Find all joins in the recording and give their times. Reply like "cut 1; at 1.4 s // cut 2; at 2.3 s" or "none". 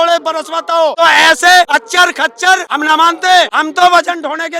cut 1; at 0.9 s // cut 2; at 1.7 s // cut 3; at 2.7 s // cut 4; at 3.6 s

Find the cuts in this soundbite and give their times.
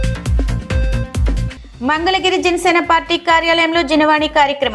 cut 1; at 0.8 s // cut 2; at 1.4 s

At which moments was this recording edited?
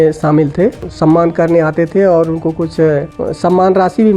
cut 1; at 0.9 s // cut 2; at 3.2 s

